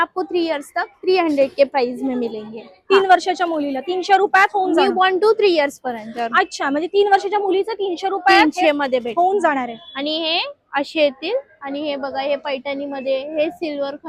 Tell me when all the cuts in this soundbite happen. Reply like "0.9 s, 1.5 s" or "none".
none